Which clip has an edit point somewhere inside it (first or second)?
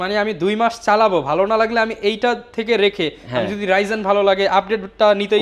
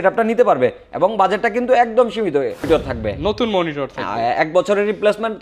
second